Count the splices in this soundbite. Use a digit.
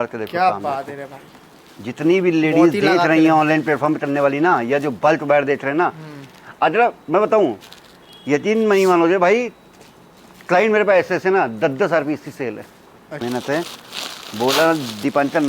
1